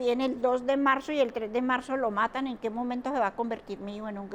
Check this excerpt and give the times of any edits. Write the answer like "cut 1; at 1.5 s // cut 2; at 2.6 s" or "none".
none